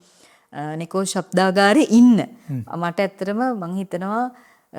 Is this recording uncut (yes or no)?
yes